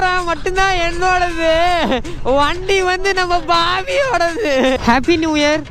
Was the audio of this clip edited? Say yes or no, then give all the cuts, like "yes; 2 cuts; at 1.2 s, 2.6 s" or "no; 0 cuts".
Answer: yes; 1 cut; at 4.8 s